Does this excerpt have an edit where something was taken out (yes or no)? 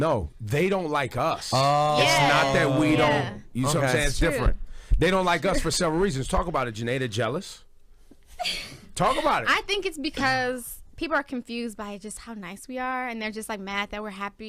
no